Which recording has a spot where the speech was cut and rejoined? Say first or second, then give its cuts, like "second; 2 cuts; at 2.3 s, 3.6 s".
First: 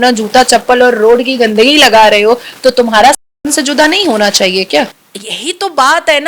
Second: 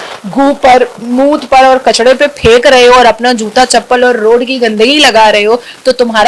first; 1 cut; at 5.0 s